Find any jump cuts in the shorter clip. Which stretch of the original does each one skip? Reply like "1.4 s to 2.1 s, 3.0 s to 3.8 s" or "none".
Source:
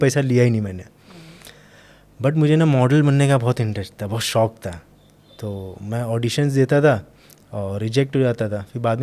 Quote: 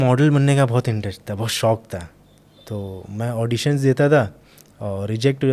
none